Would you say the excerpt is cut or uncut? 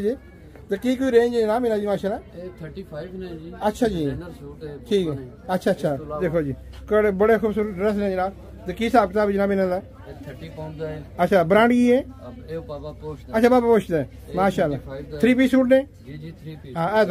uncut